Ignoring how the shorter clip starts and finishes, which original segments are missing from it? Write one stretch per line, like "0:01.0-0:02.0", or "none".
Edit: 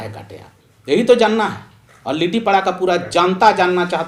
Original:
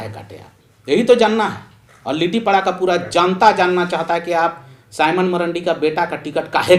none

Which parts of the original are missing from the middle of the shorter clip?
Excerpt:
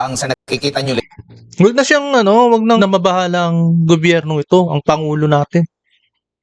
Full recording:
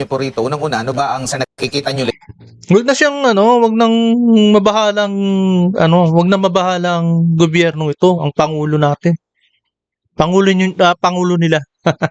0:03.9-0:06.3

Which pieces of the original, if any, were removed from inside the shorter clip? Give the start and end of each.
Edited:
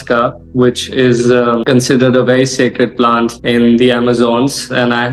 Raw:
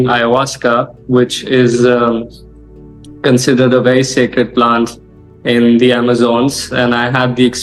0:02.2-0:03.2
0:04.9-0:05.4

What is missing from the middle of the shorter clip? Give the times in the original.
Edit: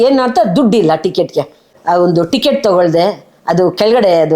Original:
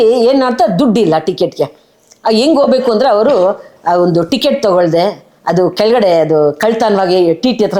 0:01.9-0:03.7

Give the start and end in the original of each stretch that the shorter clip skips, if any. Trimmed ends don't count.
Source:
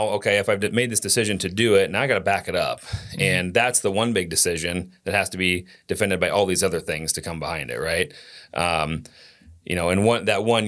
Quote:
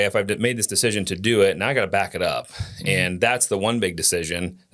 none

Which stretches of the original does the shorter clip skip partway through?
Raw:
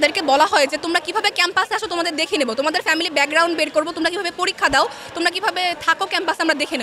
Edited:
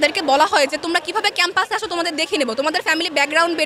none

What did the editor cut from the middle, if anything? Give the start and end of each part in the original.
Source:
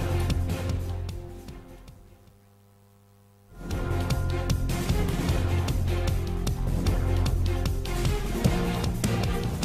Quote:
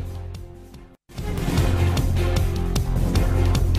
0:02.0-0:04.9

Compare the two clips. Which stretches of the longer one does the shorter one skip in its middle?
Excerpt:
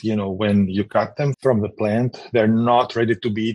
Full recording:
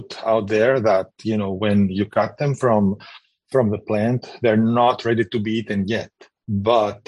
0:02.5-0:03.4

